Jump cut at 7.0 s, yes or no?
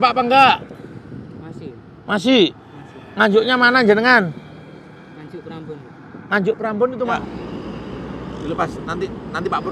yes